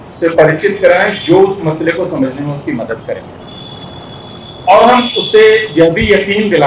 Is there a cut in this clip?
no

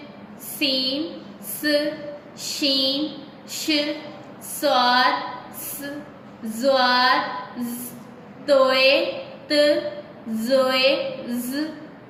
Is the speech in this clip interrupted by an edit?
no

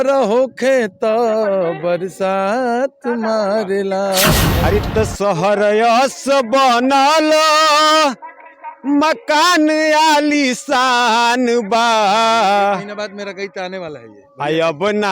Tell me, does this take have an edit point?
yes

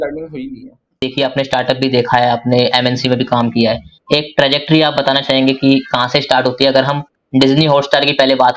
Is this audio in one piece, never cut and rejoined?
no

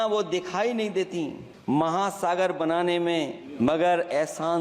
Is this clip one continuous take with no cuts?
no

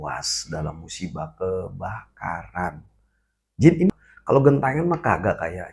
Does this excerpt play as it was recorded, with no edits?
no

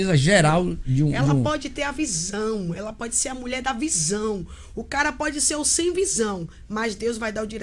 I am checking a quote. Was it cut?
no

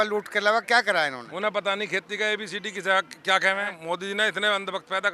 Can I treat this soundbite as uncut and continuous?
no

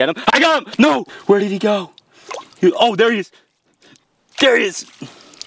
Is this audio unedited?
yes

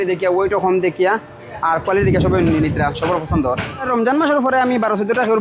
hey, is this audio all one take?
no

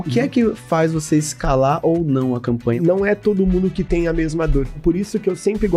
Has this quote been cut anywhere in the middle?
yes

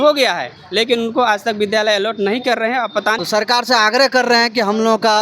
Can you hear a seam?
yes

